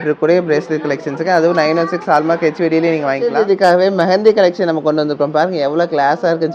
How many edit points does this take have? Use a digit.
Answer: 1